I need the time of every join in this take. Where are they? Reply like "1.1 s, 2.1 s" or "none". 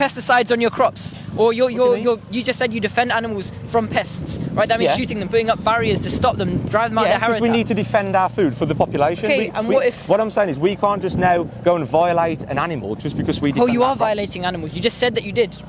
none